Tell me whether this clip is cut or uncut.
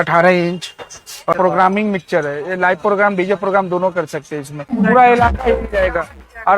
cut